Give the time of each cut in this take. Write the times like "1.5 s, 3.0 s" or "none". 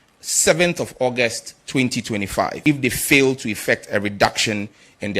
2.6 s